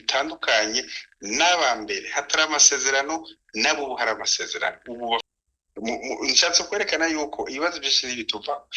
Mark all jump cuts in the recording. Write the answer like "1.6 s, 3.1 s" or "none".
5.2 s